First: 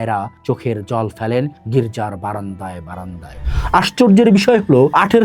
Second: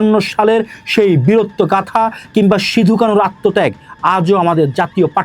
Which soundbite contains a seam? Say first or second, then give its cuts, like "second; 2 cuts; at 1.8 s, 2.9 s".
first; 1 cut; at 3.4 s